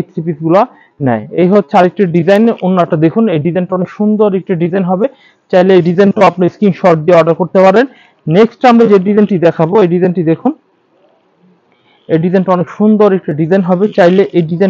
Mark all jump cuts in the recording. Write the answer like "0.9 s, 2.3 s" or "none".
none